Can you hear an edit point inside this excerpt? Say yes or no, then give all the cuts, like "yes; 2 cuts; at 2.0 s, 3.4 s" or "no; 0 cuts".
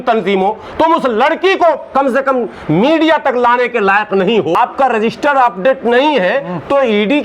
yes; 1 cut; at 4.6 s